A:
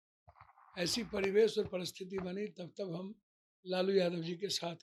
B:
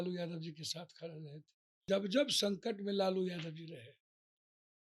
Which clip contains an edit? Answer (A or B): B